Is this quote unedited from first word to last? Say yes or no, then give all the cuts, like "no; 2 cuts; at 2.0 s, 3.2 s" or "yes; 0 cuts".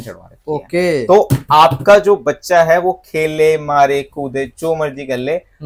yes; 0 cuts